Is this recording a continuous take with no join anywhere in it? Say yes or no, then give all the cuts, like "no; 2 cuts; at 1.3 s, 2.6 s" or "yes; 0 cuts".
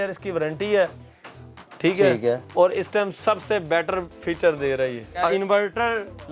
no; 1 cut; at 5.3 s